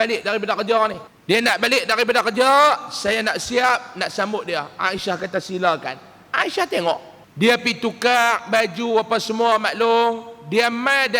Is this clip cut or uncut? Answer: cut